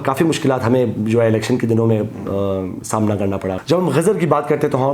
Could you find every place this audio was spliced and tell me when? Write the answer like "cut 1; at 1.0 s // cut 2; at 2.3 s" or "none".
cut 1; at 3.6 s